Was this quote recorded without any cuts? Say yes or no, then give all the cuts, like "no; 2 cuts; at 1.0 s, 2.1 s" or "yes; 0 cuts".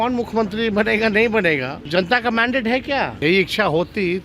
no; 2 cuts; at 1.8 s, 3.1 s